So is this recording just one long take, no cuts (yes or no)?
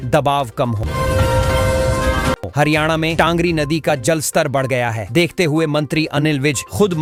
yes